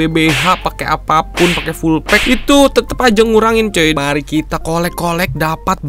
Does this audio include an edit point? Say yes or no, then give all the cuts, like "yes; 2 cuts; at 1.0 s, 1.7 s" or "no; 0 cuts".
yes; 1 cut; at 4.0 s